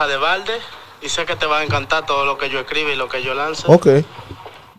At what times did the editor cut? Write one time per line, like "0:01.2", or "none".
none